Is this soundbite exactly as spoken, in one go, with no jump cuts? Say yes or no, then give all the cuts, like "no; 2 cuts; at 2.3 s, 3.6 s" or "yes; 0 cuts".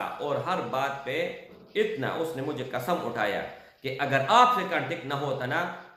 no; 1 cut; at 1.6 s